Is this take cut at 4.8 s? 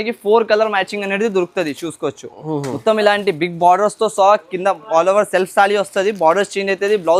no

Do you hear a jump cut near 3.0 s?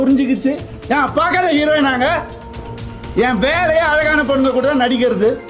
no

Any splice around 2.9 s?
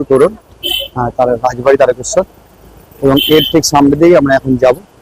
no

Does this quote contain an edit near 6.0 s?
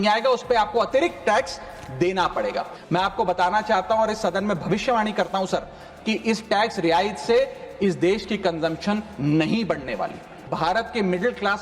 no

